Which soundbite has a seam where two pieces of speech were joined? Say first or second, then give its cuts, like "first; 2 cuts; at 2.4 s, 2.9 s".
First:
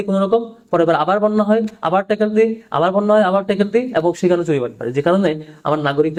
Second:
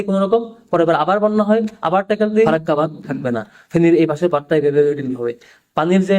second; 1 cut; at 2.5 s